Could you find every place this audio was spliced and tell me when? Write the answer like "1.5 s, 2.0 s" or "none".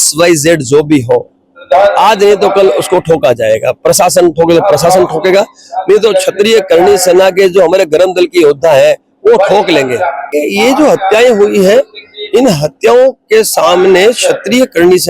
10.3 s